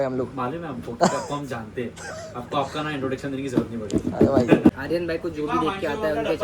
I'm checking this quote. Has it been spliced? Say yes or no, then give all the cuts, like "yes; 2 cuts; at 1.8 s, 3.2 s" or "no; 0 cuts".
yes; 1 cut; at 4.7 s